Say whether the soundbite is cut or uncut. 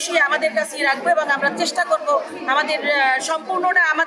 uncut